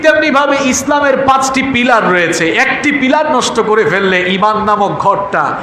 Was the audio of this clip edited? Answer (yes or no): no